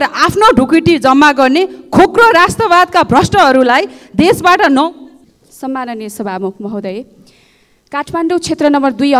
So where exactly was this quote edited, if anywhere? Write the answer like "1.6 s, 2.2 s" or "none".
none